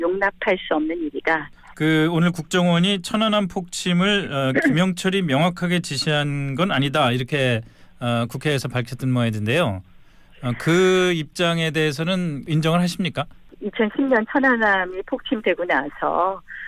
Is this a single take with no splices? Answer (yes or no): yes